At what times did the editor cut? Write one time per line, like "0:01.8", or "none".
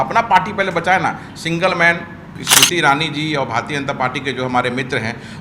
0:02.4